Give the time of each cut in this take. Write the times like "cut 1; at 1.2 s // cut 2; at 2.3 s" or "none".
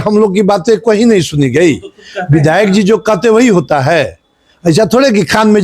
none